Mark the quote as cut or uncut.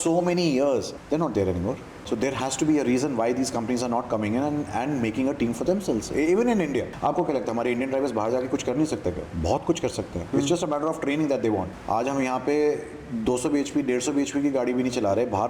cut